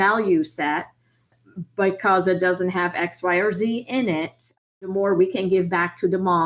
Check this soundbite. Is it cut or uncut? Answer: cut